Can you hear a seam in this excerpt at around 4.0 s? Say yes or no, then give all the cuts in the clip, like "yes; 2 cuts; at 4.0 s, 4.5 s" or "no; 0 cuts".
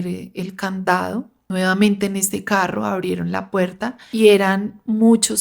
yes; 2 cuts; at 1.4 s, 4.0 s